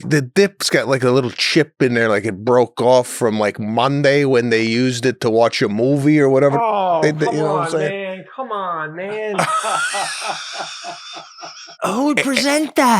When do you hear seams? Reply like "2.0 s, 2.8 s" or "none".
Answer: 11.6 s